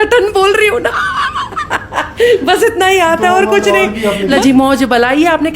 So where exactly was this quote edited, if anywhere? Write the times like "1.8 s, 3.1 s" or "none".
4.3 s